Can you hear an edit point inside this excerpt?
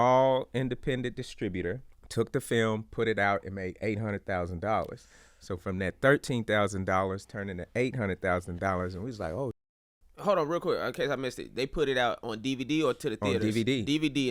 yes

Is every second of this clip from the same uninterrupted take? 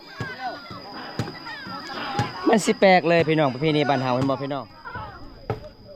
no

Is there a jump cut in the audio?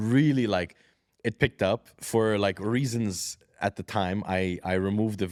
no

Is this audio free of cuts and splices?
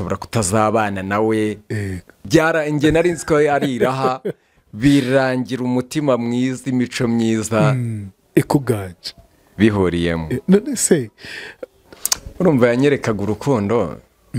no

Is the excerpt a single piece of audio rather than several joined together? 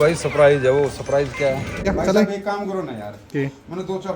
no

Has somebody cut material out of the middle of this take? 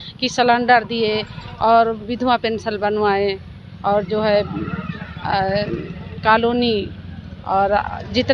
no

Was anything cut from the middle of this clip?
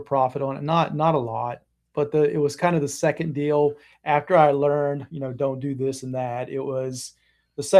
no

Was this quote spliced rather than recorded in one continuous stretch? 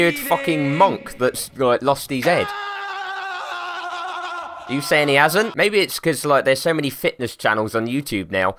yes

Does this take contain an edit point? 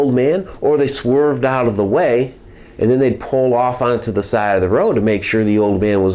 no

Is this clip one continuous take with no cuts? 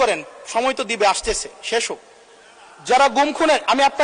yes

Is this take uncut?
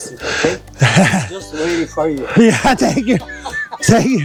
yes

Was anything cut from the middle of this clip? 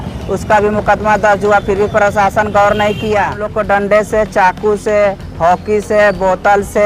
yes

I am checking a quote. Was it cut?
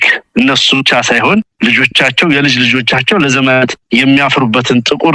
no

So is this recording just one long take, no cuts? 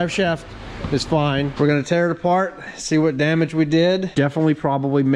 no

